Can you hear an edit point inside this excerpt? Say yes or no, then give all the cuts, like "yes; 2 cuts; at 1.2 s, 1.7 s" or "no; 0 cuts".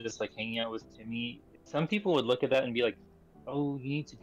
yes; 1 cut; at 1.5 s